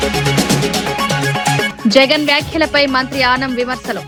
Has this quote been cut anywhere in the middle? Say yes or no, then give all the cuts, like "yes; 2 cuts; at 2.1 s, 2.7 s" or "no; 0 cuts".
no; 0 cuts